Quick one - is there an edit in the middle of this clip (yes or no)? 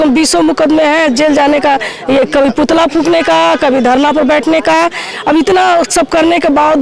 no